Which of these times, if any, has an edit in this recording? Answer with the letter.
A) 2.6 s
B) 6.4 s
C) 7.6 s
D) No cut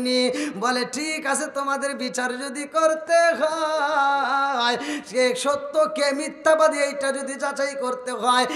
D